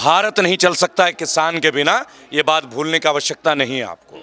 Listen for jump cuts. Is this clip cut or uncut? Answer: uncut